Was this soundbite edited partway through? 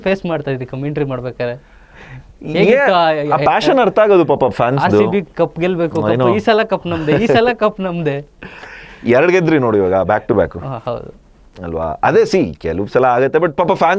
no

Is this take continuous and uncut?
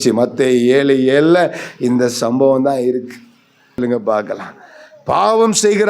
no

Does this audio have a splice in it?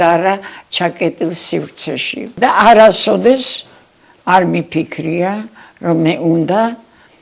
yes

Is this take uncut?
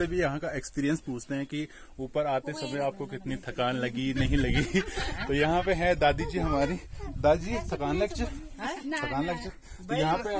yes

